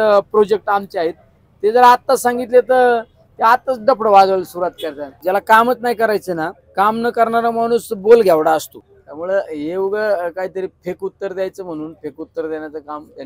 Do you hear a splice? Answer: yes; 2 cuts; at 5.2 s, 8.8 s

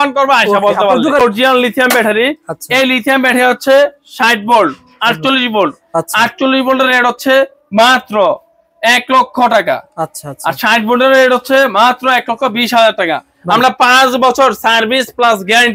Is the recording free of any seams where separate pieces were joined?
no; 1 cut; at 1.2 s

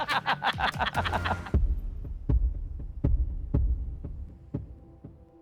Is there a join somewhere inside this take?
yes; 1 cut; at 1.4 s

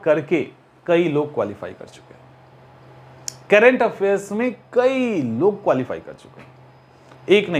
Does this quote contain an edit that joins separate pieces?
no; 0 cuts

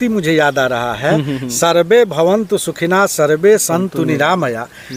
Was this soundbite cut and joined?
no; 0 cuts

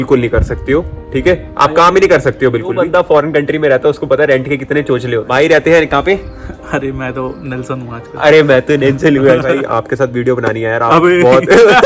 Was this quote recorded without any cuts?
no; 3 cuts; at 2.8 s, 5.3 s, 9.5 s

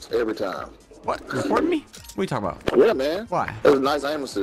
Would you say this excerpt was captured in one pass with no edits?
no; 3 cuts; at 1.3 s, 2.6 s, 3.2 s

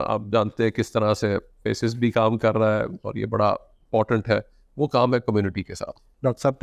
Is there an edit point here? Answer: no; 0 cuts

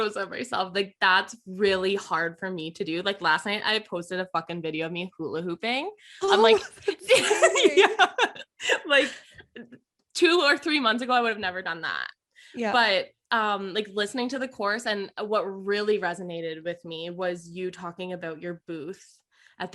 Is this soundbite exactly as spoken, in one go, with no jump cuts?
yes; 0 cuts

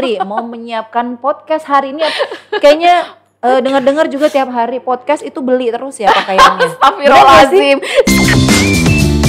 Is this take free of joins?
no; 1 cut; at 8.1 s

